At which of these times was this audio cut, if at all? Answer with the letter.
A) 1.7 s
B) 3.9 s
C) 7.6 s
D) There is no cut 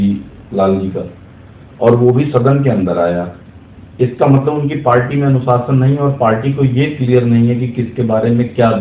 D